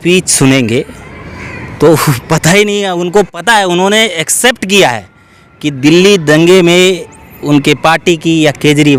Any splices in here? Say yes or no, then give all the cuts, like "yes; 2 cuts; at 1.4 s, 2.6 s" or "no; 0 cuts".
no; 0 cuts